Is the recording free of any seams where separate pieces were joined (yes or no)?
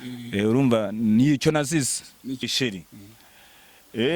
no